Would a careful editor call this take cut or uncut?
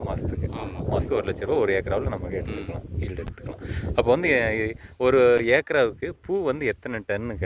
uncut